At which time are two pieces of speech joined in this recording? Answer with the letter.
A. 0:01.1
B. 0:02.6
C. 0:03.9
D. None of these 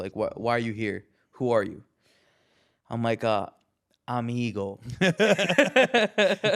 D